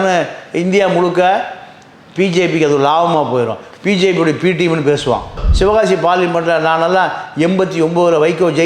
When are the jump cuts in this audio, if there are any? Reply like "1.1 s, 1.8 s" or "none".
5.4 s